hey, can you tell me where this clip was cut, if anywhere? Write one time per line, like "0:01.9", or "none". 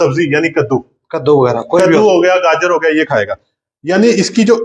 none